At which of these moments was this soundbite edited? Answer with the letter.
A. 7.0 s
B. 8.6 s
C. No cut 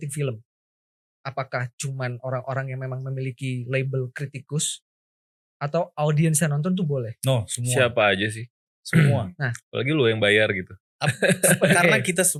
C